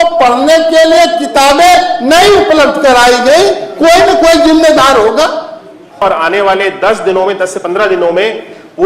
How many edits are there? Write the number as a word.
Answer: one